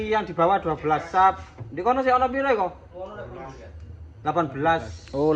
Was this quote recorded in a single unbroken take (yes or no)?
yes